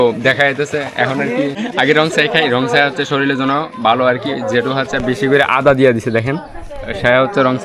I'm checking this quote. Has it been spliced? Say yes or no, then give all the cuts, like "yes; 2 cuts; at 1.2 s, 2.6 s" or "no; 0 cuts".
no; 0 cuts